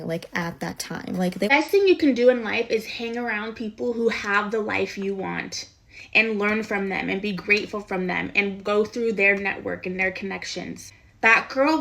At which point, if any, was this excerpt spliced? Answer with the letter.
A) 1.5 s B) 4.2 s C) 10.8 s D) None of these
A